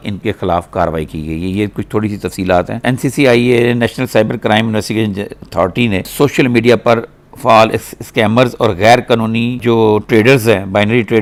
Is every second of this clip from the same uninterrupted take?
yes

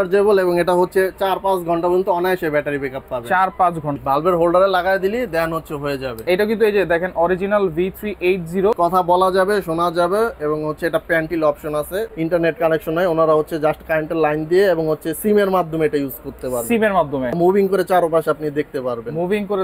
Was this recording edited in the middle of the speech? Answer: yes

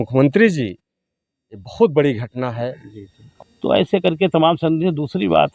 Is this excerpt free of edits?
no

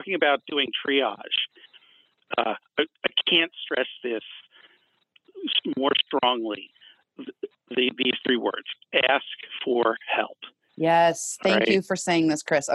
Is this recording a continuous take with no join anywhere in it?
yes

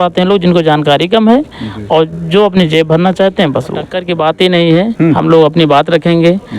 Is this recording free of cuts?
no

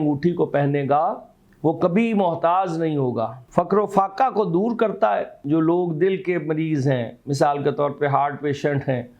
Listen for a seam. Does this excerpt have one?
yes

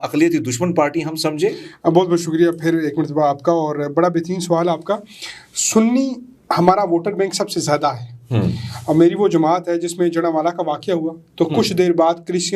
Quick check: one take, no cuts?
yes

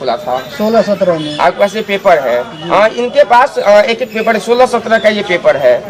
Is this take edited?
no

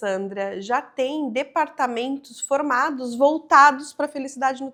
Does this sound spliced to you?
no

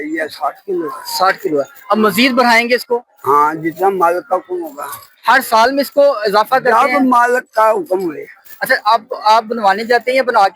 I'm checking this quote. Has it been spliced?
no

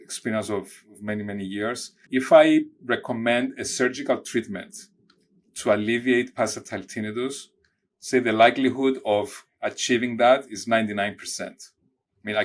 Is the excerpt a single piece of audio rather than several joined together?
yes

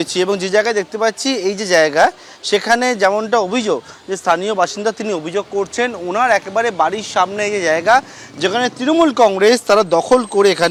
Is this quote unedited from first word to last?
yes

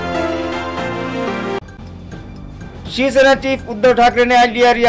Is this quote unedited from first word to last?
no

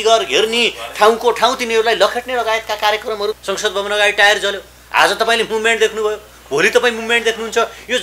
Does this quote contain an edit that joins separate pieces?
yes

